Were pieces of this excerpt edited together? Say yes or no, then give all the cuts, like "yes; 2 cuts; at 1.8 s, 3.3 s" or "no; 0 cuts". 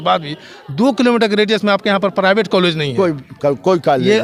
no; 0 cuts